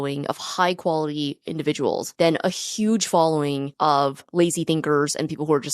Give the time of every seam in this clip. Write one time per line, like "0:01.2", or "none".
0:02.1
0:03.9

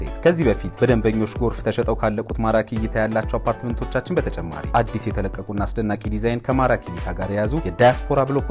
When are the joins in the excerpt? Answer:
none

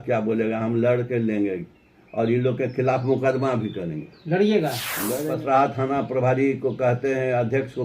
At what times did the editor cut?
0:05.2

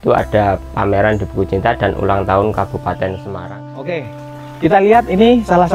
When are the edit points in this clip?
0:03.3

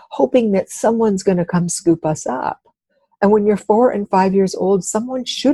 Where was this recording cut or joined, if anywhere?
none

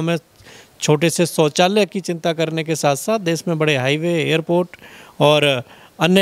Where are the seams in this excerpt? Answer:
none

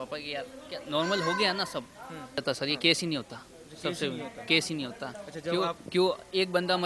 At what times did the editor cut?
0:02.4

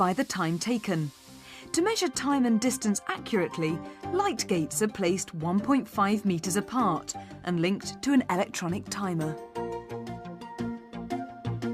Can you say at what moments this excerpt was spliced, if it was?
0:03.1

